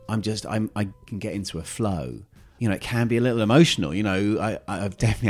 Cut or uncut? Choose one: cut